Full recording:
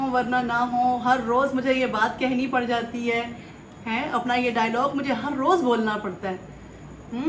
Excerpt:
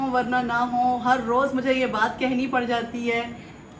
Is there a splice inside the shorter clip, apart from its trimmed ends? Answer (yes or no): no